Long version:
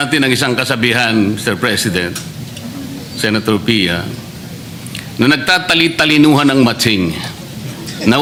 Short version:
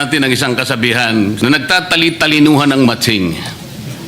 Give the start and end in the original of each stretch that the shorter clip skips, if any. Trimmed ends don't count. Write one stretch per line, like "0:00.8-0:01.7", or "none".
0:01.4-0:05.1